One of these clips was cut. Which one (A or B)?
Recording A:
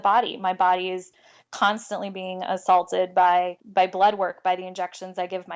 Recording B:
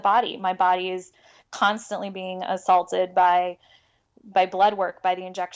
A